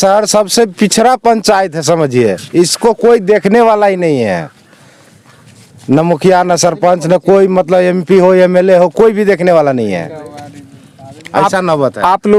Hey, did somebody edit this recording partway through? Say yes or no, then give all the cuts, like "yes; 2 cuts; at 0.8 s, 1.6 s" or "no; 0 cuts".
no; 0 cuts